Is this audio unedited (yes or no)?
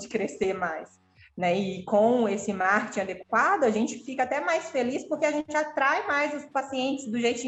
yes